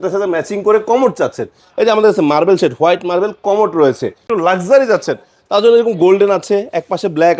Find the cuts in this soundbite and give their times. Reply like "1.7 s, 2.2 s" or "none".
4.3 s